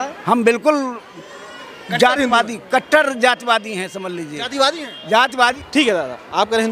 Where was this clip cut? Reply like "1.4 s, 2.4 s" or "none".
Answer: 5.6 s